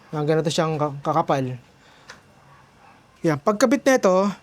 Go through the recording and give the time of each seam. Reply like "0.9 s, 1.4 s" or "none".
3.0 s